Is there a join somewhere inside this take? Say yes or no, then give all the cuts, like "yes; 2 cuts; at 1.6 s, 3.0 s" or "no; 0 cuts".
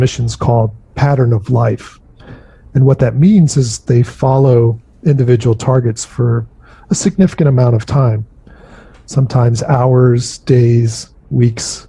no; 0 cuts